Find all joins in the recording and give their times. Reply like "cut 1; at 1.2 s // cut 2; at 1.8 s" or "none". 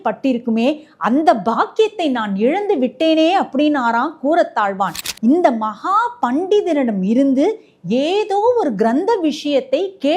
cut 1; at 5.0 s